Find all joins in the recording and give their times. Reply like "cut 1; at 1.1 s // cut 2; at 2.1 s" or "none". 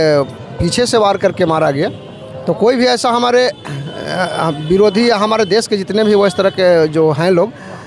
none